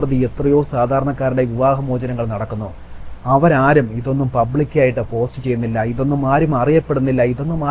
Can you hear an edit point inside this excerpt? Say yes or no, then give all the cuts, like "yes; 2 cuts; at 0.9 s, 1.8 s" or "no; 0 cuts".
no; 0 cuts